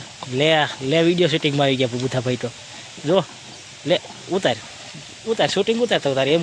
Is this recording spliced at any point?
no; 0 cuts

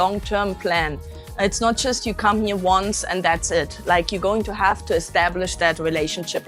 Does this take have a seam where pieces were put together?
no; 0 cuts

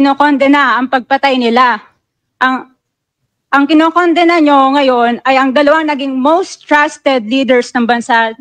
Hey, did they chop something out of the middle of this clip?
no; 0 cuts

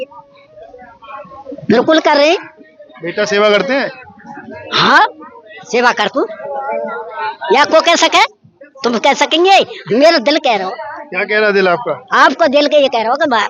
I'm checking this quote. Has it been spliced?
no; 0 cuts

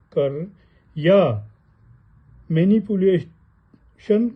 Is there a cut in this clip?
no; 0 cuts

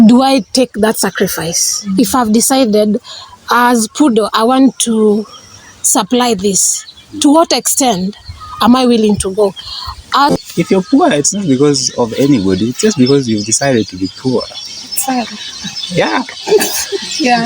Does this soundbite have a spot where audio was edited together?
yes; 1 cut; at 10.3 s

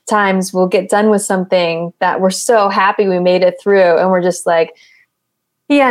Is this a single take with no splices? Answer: yes; 0 cuts

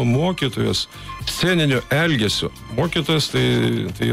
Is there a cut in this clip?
no; 0 cuts

